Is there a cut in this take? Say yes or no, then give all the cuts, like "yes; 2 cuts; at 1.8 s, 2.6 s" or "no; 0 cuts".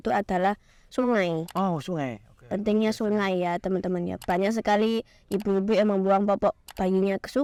no; 0 cuts